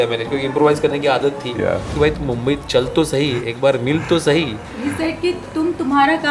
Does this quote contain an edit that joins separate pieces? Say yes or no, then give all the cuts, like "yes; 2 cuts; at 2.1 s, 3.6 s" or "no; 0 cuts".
yes; 1 cut; at 1.9 s